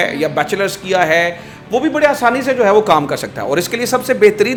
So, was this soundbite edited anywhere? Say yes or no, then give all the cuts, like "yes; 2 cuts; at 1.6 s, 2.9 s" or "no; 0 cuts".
no; 0 cuts